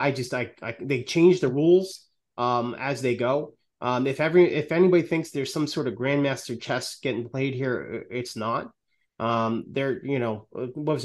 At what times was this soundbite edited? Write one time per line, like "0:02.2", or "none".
none